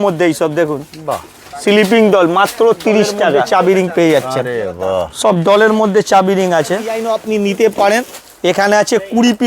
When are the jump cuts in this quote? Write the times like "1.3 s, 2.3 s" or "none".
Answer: 3.4 s, 7.0 s